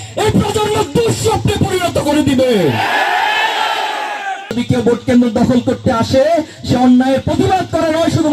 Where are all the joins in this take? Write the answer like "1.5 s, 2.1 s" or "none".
4.5 s